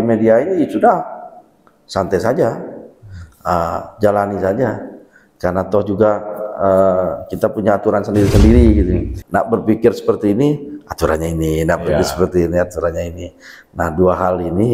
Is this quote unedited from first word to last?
no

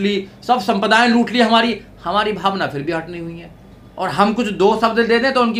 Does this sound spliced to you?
no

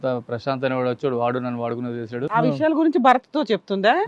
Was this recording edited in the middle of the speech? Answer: yes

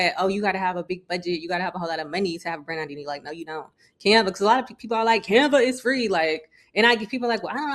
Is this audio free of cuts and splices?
yes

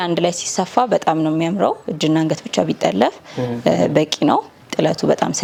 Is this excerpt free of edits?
yes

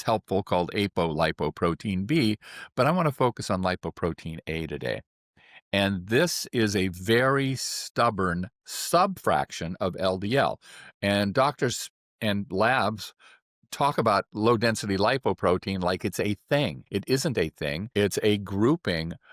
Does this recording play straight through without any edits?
no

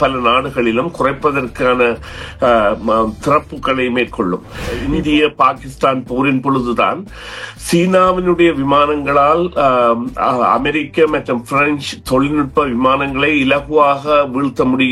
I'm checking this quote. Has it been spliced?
yes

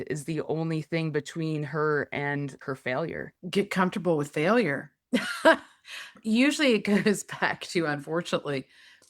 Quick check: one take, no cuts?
no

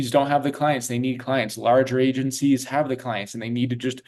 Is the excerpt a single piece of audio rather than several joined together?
yes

